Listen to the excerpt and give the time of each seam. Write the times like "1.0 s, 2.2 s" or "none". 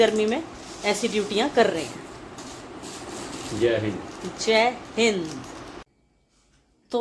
5.8 s